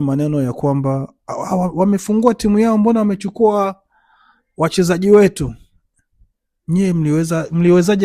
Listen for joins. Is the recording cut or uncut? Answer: uncut